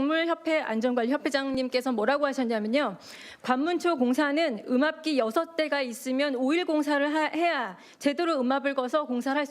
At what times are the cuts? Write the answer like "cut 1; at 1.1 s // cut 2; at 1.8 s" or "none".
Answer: cut 1; at 2.0 s